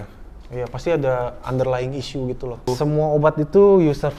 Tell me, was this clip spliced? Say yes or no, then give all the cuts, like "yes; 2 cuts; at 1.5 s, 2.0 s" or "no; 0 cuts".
yes; 1 cut; at 2.7 s